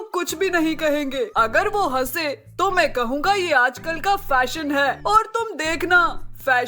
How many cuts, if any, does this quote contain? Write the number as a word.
two